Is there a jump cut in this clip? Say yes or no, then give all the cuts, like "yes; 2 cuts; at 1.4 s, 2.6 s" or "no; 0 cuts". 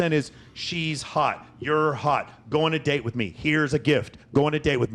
no; 0 cuts